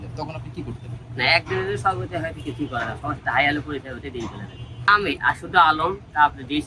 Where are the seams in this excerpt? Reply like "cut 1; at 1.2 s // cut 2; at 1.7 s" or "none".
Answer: cut 1; at 4.9 s